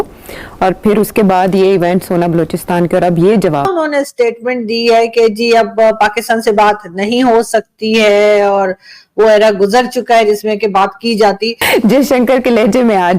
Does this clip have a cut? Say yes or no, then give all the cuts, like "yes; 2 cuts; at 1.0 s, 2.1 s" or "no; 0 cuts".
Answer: yes; 2 cuts; at 3.7 s, 11.7 s